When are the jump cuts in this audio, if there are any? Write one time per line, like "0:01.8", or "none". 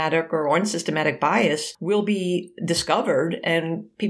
0:01.7

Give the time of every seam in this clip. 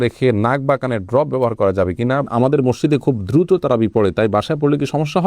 0:02.3

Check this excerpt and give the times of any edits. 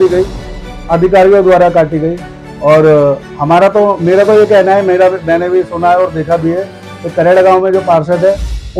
none

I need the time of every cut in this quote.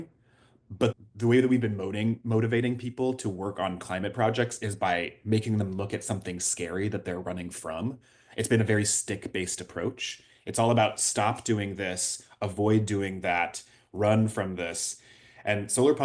0:00.9

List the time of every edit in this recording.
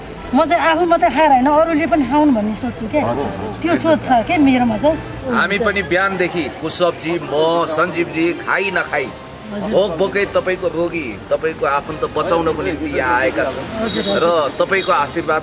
0:05.1

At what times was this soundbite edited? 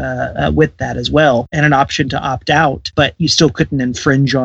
0:01.5

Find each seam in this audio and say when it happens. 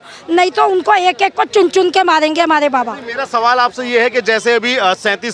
none

